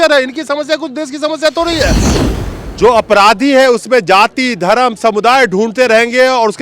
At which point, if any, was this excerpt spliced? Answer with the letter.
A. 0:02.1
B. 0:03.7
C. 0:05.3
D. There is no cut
A